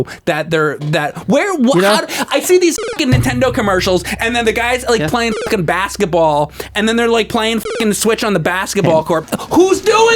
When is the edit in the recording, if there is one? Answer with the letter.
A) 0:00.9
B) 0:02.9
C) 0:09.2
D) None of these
C